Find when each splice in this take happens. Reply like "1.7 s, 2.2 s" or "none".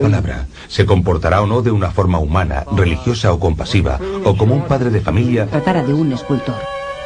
none